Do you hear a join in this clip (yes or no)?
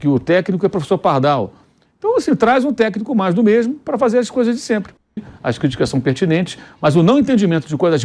yes